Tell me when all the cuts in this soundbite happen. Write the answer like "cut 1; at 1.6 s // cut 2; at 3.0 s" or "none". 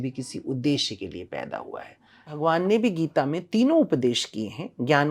cut 1; at 2.3 s